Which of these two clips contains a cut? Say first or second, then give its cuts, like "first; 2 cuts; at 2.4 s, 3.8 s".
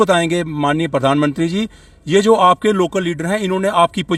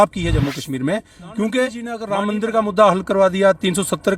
second; 1 cut; at 2.0 s